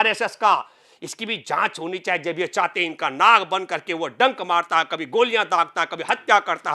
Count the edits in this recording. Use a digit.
0